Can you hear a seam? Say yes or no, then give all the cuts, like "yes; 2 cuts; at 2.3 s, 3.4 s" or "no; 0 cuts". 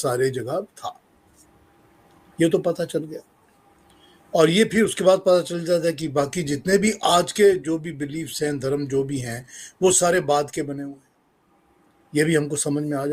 no; 0 cuts